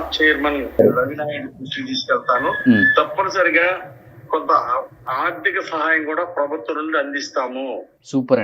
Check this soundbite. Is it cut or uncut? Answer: uncut